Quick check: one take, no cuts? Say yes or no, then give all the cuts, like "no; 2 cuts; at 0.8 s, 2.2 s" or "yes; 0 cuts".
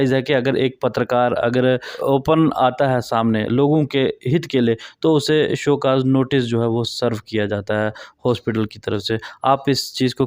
no; 1 cut; at 1.9 s